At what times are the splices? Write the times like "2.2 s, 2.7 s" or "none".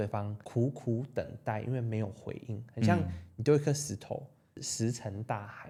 none